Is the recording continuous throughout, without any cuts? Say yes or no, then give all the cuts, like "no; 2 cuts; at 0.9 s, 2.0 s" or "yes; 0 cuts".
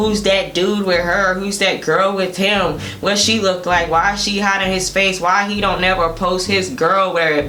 yes; 0 cuts